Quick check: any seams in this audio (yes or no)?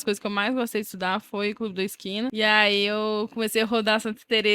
yes